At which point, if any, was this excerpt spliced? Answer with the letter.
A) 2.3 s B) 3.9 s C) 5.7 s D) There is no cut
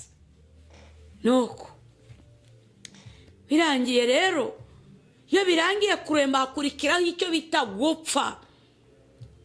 D